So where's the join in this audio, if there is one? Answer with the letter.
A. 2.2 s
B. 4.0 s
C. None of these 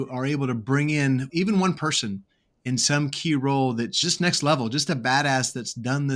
B